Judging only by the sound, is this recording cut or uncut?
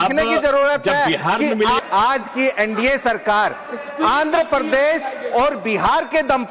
cut